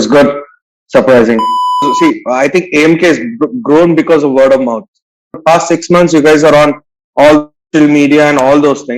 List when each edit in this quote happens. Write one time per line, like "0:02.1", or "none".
0:01.9
0:05.3

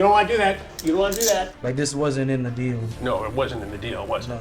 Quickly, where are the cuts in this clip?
0:01.5
0:02.9

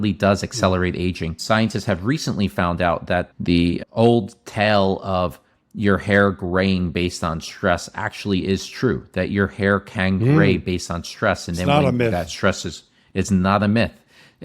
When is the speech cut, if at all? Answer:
0:01.3

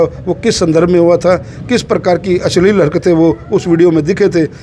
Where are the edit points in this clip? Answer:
none

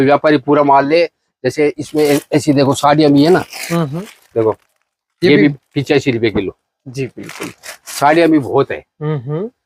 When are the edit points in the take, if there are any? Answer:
none

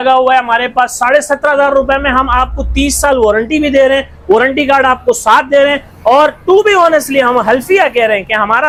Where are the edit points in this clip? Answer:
none

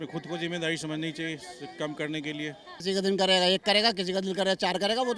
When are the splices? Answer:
0:02.7

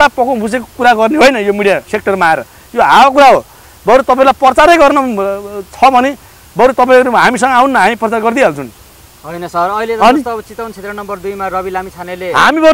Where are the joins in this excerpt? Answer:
none

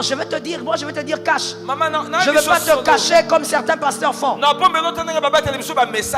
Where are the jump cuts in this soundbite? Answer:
none

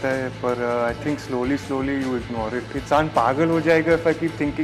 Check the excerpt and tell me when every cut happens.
0:02.7

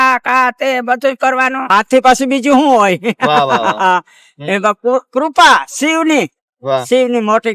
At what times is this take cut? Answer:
0:01.6

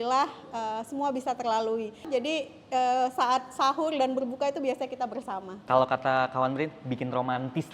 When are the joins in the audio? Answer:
0:02.0
0:05.6

